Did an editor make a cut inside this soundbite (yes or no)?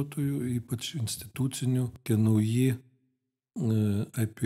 yes